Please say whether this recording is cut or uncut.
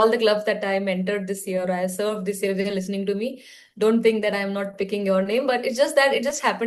uncut